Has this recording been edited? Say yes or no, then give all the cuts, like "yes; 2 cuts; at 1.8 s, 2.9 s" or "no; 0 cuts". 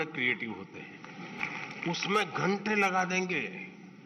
yes; 1 cut; at 1.4 s